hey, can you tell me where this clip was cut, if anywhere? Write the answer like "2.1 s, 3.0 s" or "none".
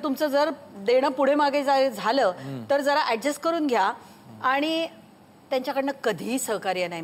none